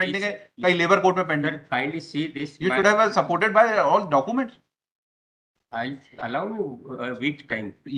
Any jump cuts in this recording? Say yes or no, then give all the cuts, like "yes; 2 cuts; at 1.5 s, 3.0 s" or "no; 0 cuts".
no; 0 cuts